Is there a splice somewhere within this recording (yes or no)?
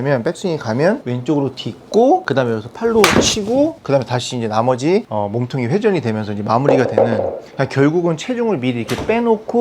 yes